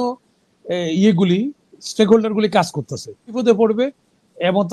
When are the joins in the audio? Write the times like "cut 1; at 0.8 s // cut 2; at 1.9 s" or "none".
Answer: cut 1; at 3.4 s